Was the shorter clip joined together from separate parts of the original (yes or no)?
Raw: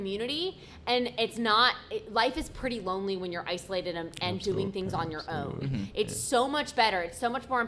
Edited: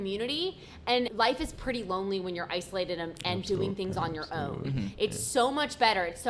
yes